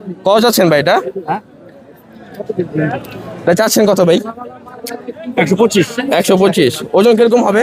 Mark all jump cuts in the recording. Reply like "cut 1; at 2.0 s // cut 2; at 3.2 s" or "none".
none